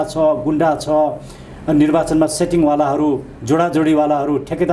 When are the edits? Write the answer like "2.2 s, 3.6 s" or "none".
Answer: none